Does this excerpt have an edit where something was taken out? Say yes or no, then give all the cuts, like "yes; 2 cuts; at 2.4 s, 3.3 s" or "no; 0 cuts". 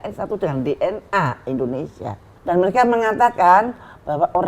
yes; 1 cut; at 2.3 s